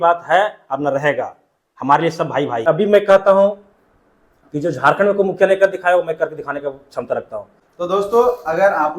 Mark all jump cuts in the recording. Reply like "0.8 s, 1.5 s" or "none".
2.7 s, 7.6 s